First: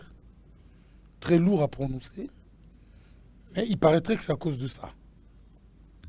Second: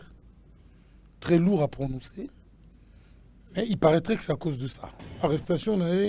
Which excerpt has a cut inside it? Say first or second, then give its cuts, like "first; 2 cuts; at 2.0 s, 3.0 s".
second; 1 cut; at 5.1 s